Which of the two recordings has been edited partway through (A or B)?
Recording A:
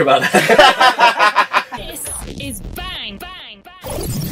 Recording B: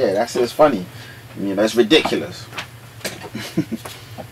A